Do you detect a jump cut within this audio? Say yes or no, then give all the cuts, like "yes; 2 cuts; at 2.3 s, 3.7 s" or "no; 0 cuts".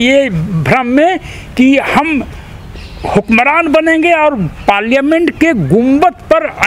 no; 0 cuts